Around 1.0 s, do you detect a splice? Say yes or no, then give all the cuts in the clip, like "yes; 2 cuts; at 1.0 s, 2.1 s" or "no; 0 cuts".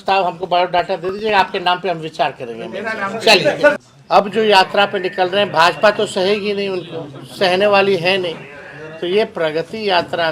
no; 1 cut; at 3.7 s